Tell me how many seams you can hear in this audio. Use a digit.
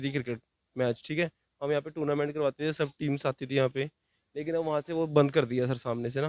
0